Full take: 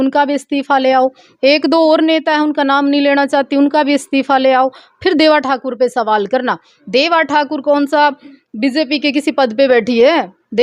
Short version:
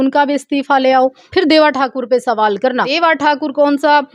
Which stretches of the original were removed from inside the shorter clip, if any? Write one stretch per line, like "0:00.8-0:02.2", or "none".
0:01.2-0:04.9
0:06.6-0:07.0